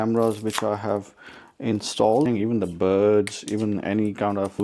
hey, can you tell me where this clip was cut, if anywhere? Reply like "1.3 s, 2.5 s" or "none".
2.3 s